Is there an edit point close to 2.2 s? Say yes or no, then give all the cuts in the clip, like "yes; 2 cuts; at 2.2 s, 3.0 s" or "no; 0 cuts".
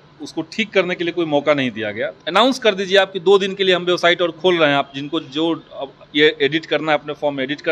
yes; 1 cut; at 2.2 s